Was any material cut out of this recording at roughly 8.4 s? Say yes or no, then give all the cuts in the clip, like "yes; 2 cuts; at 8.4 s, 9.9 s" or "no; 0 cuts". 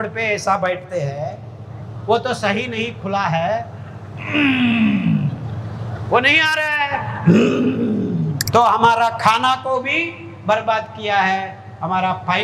yes; 1 cut; at 8.4 s